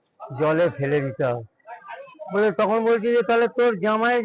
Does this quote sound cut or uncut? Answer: uncut